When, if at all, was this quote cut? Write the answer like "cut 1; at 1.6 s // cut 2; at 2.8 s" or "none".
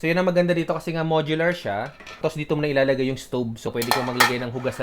cut 1; at 2.2 s // cut 2; at 3.7 s